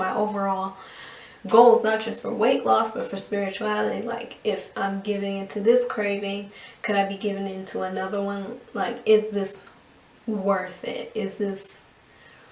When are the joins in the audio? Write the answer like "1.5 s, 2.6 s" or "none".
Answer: none

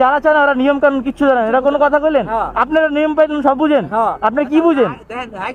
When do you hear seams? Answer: none

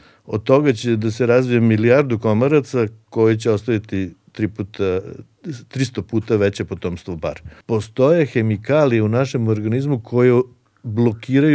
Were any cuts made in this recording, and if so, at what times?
7.5 s

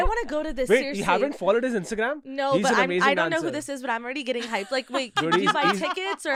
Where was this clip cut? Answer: none

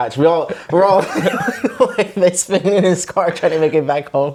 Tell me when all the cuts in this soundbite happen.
none

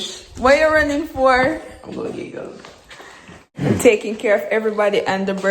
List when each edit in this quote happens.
3.6 s

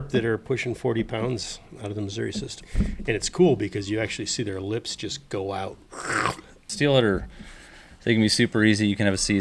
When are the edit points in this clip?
2.6 s, 6.7 s

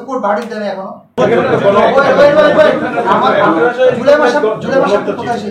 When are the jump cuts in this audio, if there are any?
1.2 s

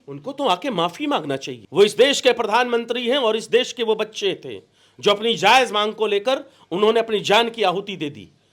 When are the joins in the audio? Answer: 1.6 s

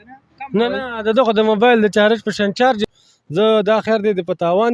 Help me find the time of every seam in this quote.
2.8 s

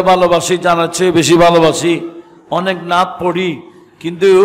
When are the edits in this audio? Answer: none

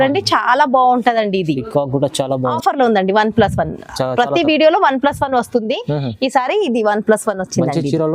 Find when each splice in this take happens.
2.5 s

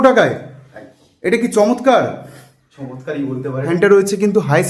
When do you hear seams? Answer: 3.6 s

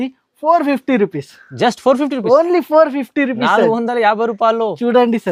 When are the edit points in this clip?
none

